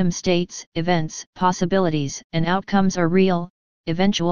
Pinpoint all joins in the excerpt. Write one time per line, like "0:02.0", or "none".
0:01.2